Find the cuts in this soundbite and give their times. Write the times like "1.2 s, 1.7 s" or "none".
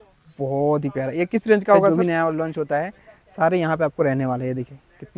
1.9 s